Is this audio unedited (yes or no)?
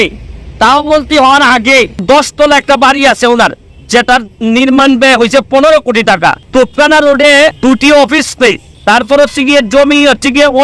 no